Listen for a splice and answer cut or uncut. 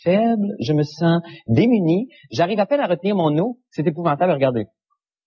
uncut